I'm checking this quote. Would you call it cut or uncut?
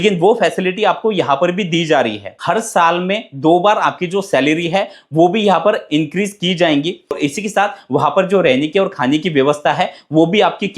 cut